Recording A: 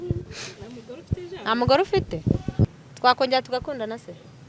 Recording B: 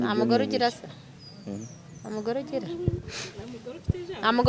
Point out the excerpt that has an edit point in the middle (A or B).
A